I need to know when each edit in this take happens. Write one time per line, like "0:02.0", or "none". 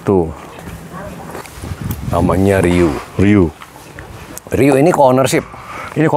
0:01.4